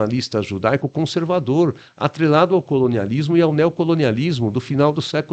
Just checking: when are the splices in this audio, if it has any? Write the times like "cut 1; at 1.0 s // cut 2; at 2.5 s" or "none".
none